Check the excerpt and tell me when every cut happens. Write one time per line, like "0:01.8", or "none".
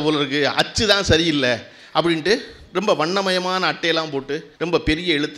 0:04.5